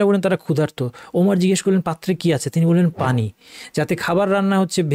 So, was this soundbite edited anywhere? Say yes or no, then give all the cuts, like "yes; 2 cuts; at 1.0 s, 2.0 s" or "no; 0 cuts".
no; 0 cuts